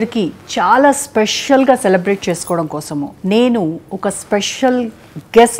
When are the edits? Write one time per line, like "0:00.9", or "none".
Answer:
none